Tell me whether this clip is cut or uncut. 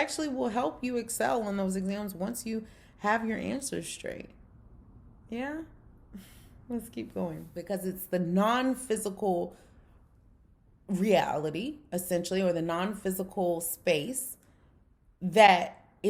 cut